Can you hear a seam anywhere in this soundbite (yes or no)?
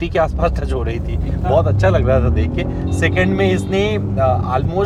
no